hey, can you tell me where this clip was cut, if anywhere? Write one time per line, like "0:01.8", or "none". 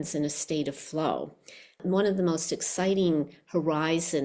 0:01.8